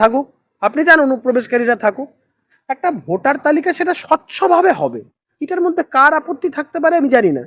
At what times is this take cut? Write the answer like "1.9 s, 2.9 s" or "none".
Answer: none